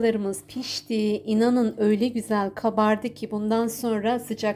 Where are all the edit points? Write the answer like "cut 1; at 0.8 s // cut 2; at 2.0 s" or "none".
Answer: none

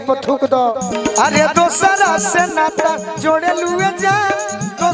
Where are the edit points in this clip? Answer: cut 1; at 1.0 s

